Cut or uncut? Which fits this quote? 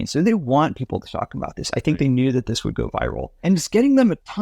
cut